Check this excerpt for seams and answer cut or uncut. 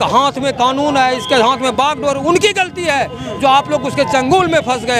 uncut